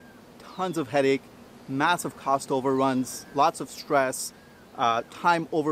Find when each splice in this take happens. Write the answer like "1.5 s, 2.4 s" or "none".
none